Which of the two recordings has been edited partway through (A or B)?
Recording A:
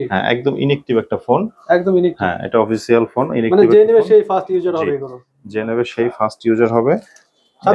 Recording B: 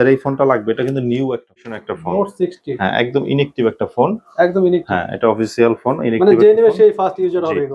B